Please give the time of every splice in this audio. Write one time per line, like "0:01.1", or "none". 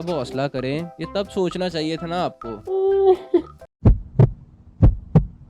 0:01.0
0:02.5

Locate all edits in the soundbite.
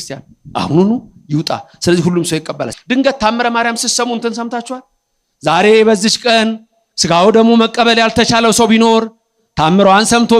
0:02.7

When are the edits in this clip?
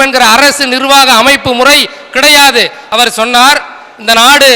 0:02.8

